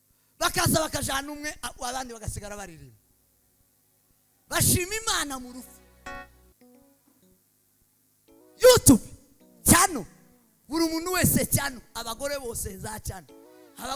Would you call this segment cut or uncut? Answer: cut